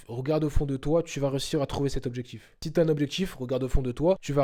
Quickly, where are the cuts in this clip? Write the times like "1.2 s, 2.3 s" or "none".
none